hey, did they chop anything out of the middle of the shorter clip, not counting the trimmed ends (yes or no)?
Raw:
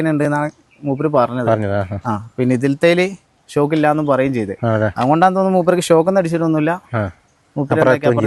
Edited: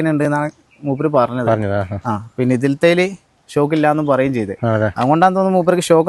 no